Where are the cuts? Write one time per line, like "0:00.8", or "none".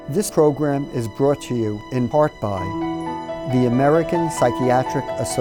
none